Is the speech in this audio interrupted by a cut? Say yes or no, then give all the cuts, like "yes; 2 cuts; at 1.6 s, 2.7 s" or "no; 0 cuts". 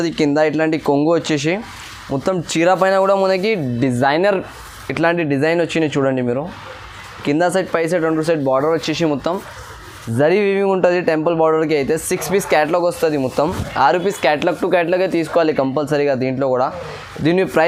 no; 0 cuts